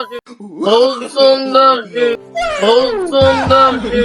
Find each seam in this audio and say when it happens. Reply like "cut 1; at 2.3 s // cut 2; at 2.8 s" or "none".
none